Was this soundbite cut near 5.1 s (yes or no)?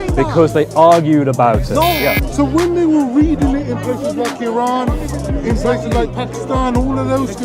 no